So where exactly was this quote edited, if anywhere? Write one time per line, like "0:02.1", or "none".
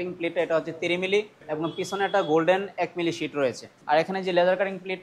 0:01.4
0:03.7